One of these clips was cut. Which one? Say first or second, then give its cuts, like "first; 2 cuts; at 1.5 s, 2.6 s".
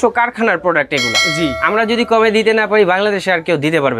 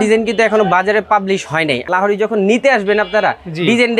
second; 1 cut; at 1.8 s